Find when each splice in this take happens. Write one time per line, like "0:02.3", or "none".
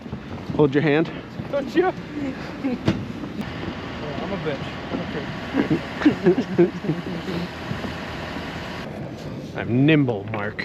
0:03.4
0:08.8